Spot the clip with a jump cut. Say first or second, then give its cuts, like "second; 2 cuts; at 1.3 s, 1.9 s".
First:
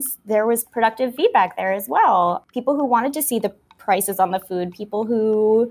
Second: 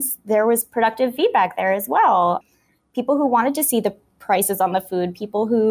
first; 1 cut; at 2.5 s